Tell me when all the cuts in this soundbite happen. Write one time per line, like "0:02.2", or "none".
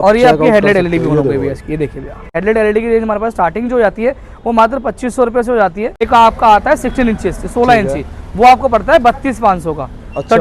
0:02.3
0:06.0